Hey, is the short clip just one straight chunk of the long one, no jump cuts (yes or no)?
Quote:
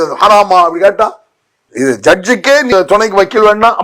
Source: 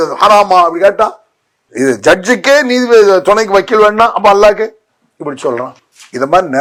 no